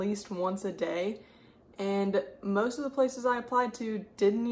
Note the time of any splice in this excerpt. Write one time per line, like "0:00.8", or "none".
none